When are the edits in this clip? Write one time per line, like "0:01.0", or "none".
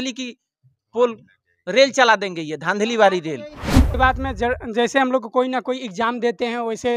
0:03.9